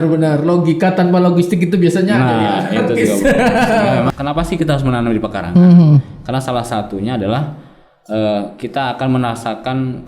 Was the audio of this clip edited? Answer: yes; 1 cut; at 4.1 s

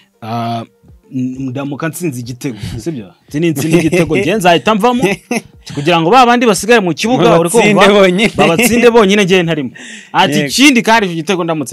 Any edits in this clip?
no; 0 cuts

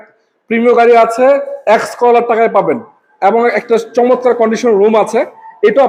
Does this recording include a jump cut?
no; 0 cuts

